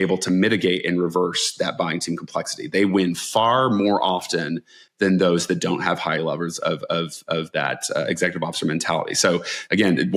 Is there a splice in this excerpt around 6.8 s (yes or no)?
no